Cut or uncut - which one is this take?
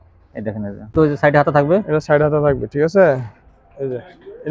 cut